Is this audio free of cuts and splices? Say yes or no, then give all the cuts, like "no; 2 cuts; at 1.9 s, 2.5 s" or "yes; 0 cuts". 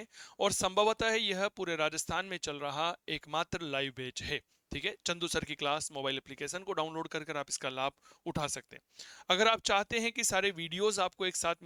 yes; 0 cuts